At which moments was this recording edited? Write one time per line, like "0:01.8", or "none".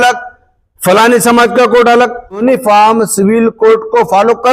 0:02.4